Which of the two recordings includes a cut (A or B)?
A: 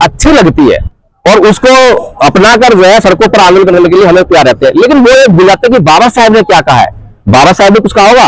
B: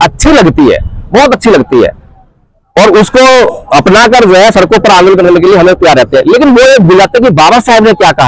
A